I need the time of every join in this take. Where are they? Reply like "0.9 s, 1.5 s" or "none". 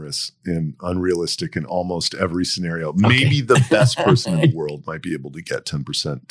none